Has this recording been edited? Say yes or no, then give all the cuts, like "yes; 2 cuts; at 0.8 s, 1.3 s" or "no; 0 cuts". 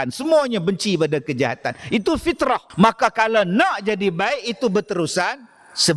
yes; 1 cut; at 2.7 s